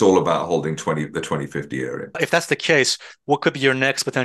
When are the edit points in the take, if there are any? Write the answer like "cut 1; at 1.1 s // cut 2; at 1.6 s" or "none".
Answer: cut 1; at 2.2 s

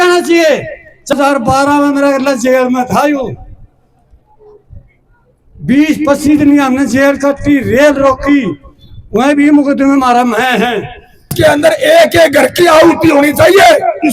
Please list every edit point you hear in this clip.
cut 1; at 1.1 s // cut 2; at 11.3 s

